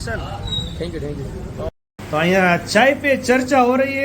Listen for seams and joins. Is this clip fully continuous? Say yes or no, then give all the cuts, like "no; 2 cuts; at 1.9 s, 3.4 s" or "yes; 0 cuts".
no; 1 cut; at 1.7 s